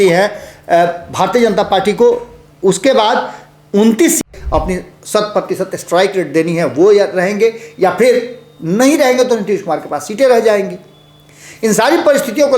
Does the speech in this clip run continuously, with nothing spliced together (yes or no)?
no